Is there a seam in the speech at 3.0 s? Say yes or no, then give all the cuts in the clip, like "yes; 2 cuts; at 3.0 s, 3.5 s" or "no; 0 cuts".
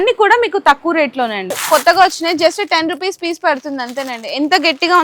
no; 1 cut; at 1.6 s